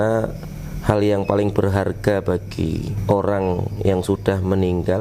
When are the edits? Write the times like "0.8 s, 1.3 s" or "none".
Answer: 2.9 s